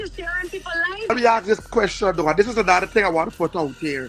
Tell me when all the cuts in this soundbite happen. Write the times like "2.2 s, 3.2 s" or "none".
1.1 s